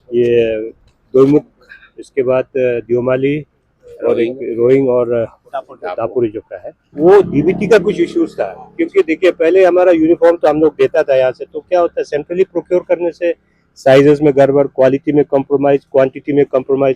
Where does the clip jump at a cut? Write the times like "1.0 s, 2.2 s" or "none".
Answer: 7.0 s